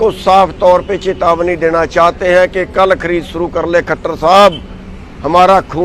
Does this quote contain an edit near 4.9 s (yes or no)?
no